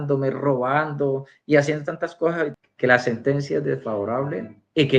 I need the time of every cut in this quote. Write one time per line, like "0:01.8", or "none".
0:02.5